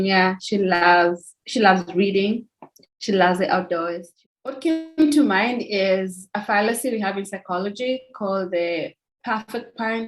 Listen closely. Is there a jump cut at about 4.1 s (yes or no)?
yes